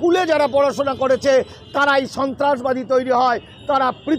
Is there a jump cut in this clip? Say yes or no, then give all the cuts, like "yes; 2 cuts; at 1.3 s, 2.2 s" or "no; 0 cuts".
no; 0 cuts